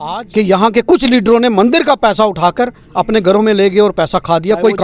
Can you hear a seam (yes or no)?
no